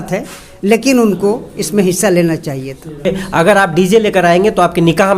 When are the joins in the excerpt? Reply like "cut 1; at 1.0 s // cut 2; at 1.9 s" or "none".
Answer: cut 1; at 3.1 s

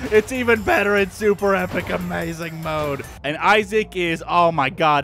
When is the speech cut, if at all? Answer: cut 1; at 3.1 s

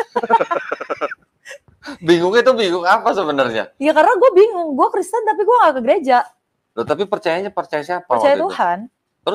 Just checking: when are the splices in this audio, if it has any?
none

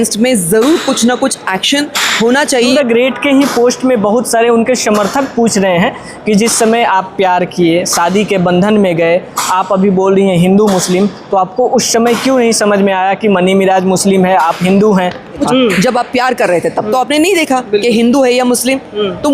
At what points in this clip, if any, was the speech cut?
cut 1; at 2.7 s // cut 2; at 15.4 s

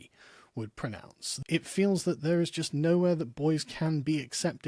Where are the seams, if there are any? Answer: cut 1; at 1.3 s

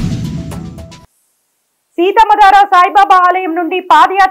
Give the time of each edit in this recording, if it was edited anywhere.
cut 1; at 1.0 s

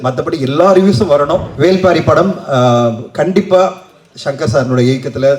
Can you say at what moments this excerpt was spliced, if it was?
cut 1; at 1.5 s

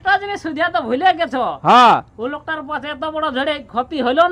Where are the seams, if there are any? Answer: none

